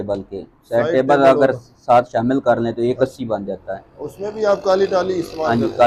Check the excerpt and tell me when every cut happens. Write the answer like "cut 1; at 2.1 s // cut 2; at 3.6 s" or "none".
none